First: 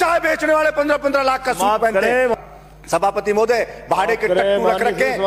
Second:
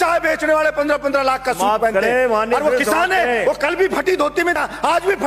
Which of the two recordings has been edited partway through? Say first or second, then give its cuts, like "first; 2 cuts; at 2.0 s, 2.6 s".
first; 1 cut; at 2.4 s